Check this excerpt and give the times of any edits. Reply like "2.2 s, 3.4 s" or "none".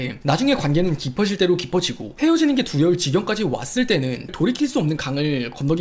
4.3 s